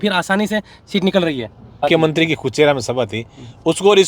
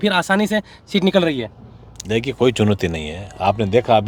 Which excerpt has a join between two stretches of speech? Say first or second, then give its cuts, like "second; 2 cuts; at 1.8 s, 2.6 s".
first; 1 cut; at 1.8 s